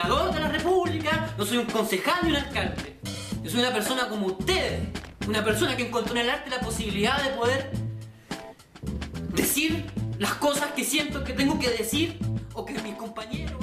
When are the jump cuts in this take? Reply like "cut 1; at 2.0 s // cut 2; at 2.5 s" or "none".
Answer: cut 1; at 7.2 s